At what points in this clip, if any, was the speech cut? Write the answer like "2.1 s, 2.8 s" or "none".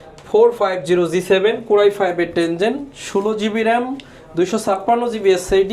none